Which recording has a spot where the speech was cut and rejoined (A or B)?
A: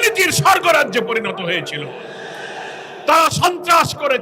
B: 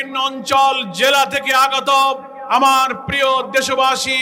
B